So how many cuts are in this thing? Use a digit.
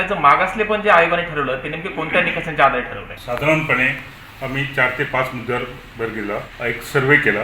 2